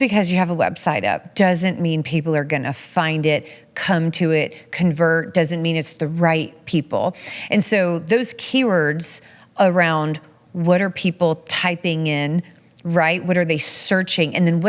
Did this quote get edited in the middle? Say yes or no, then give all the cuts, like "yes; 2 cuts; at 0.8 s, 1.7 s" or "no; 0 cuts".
no; 0 cuts